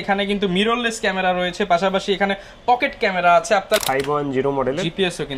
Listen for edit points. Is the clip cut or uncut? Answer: cut